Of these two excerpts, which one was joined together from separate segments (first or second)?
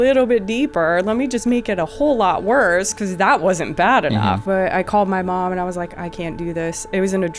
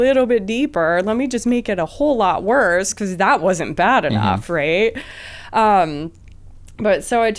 first